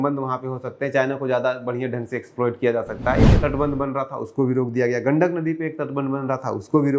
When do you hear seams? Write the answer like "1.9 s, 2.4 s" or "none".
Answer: 3.3 s